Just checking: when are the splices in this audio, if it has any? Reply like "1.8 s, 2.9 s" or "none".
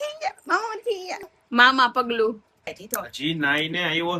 1.2 s, 2.8 s